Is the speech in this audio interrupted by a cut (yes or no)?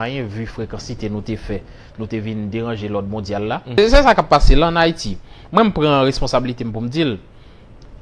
yes